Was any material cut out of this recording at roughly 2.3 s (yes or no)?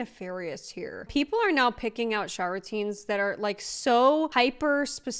no